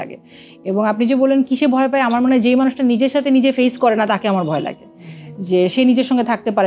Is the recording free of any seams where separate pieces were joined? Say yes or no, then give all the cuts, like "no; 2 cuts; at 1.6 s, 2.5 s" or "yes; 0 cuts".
yes; 0 cuts